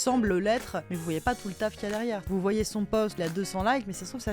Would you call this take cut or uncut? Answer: cut